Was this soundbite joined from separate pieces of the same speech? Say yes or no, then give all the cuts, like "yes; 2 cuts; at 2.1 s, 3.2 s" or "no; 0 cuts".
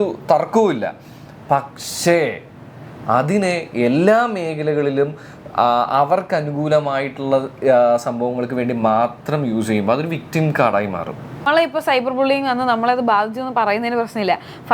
yes; 1 cut; at 11.4 s